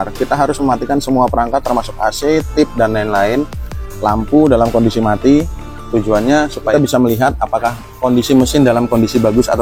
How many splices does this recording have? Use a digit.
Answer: 1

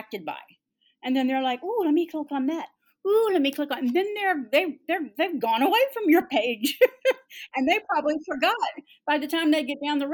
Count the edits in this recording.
0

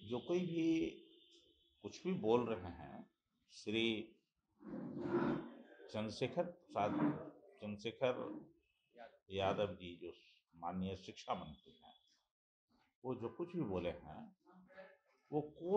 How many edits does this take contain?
0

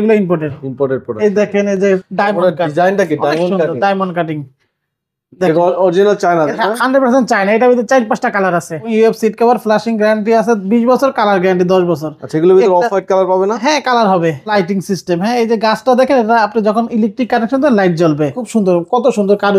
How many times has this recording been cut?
4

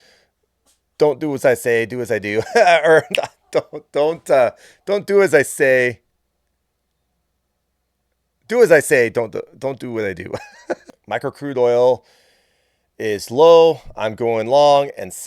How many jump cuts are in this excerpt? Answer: 1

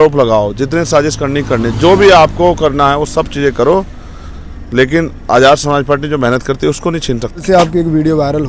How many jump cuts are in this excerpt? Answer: 1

